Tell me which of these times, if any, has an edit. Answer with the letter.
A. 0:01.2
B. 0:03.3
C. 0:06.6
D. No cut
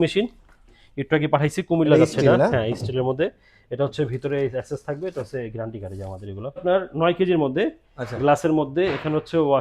C